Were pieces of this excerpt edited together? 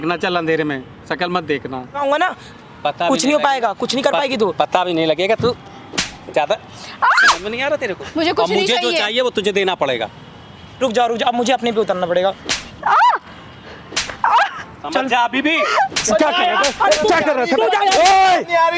yes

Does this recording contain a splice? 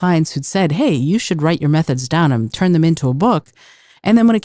no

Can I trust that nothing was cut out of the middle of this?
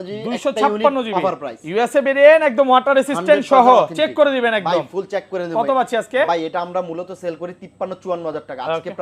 yes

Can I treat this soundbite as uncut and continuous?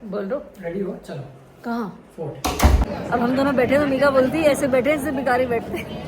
no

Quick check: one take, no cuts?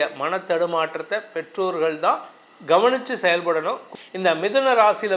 no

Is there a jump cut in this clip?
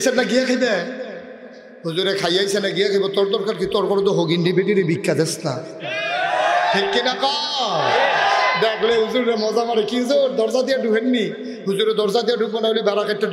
no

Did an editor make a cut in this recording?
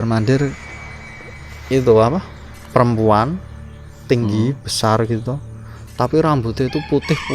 no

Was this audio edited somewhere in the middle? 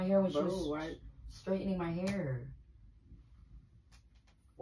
no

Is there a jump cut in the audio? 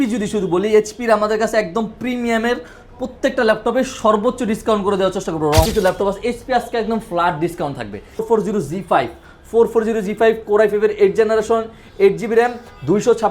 yes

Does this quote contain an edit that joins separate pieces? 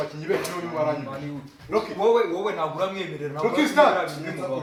no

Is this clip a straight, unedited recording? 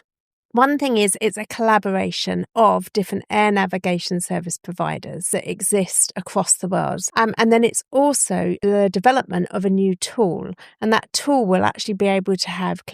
no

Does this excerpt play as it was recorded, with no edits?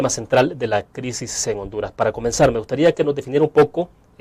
no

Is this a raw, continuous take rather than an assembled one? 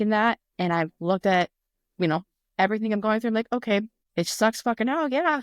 no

